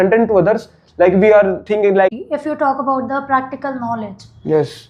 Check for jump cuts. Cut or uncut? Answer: cut